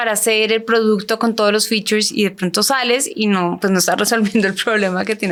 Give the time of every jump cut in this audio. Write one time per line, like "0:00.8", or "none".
none